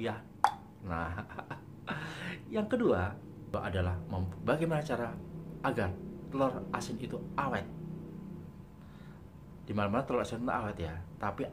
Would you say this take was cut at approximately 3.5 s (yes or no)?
yes